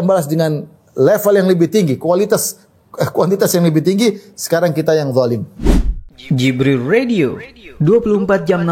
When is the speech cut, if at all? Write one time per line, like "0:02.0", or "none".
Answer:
0:05.5